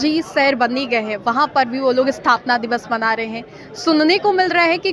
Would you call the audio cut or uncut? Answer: uncut